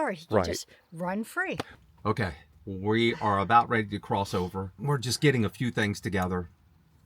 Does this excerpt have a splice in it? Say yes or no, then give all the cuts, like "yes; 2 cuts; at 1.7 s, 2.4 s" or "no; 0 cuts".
yes; 1 cut; at 1.7 s